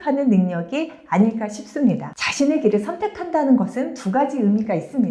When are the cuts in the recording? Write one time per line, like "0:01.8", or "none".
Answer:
none